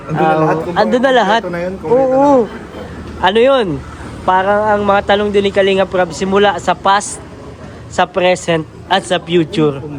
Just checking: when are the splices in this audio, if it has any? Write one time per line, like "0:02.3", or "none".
none

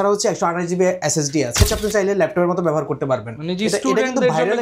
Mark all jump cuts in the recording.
0:01.6

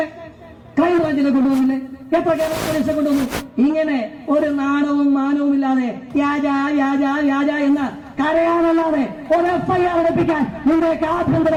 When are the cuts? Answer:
none

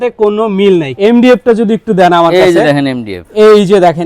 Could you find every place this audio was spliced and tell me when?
0:00.9

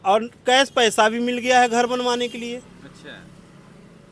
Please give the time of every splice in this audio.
none

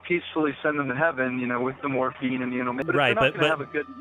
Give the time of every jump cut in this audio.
0:02.8

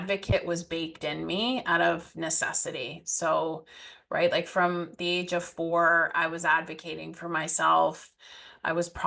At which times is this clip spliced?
none

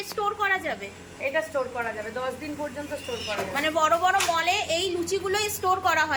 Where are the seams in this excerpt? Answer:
none

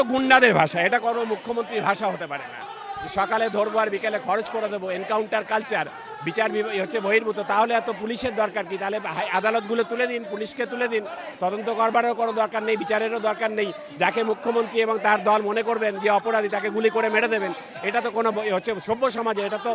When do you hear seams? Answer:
none

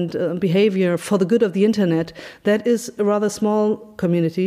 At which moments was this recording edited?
none

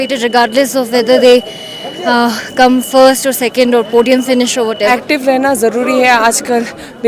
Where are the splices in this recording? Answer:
0:04.8

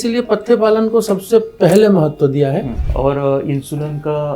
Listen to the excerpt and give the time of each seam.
0:02.8

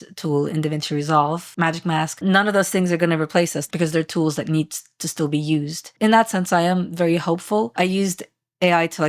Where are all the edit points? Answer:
0:01.5
0:03.7
0:07.7

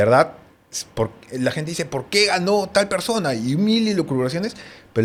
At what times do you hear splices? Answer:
none

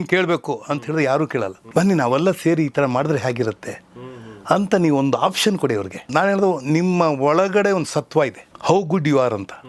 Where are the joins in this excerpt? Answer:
0:01.6
0:06.0
0:08.5

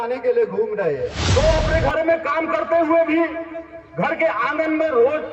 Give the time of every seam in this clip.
0:01.2

